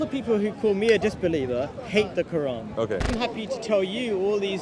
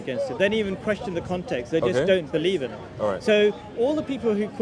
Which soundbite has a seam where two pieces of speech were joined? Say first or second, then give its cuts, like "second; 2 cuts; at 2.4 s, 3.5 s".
first; 1 cut; at 3.1 s